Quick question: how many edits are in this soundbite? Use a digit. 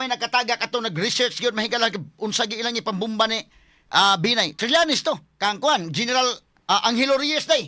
2